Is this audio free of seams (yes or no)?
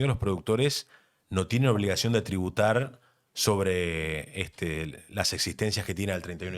yes